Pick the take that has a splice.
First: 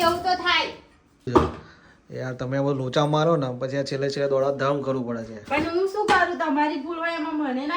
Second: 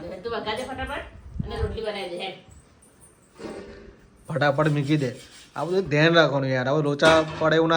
first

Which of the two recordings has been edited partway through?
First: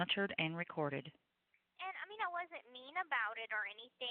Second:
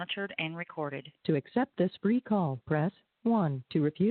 second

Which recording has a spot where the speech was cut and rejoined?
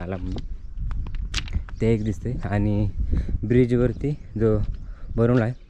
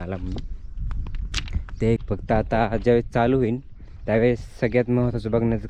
second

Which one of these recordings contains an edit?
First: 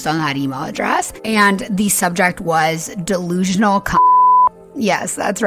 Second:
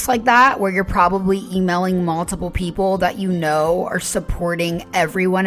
first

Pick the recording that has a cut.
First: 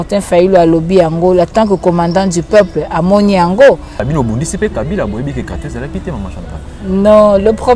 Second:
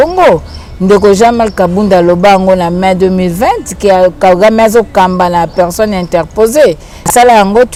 first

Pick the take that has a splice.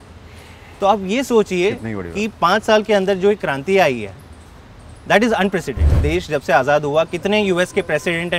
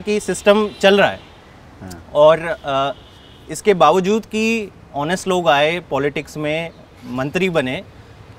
first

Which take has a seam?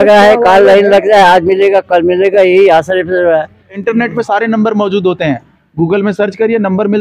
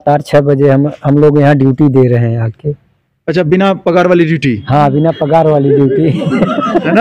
first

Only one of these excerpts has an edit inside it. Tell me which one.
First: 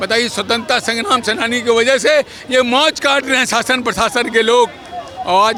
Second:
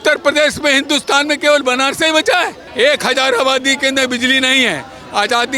second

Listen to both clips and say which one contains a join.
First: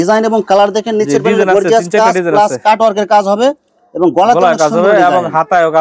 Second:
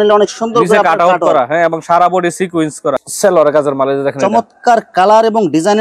second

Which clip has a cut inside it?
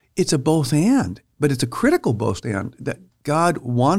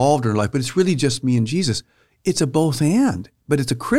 first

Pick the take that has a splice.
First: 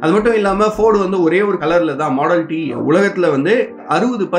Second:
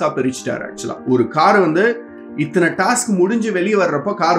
first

